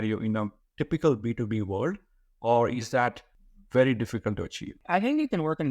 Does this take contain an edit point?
yes; 1 cut; at 4.8 s

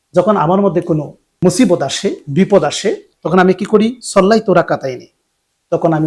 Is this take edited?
yes; 2 cuts; at 1.3 s, 3.1 s

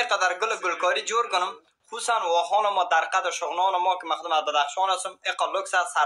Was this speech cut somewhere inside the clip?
no; 0 cuts

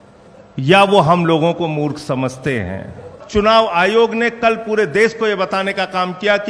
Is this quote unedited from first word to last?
no; 1 cut; at 3.2 s

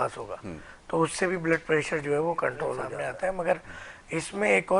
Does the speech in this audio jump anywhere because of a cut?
yes; 1 cut; at 2.9 s

